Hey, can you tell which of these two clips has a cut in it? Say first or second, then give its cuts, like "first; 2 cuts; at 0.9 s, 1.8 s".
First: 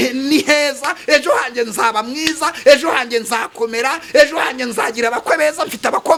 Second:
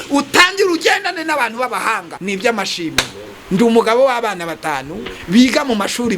second; 1 cut; at 2.1 s